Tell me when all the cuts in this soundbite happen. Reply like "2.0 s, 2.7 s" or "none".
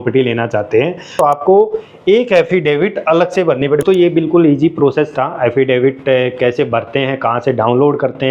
1.1 s, 3.8 s